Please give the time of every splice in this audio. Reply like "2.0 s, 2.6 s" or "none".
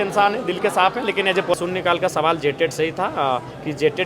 1.5 s